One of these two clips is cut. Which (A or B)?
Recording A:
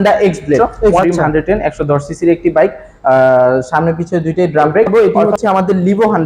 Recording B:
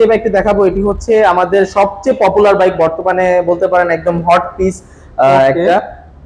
A